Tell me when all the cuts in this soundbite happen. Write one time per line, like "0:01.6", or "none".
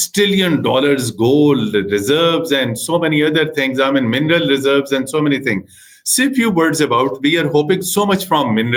none